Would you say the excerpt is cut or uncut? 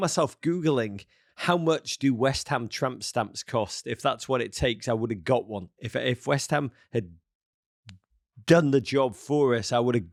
uncut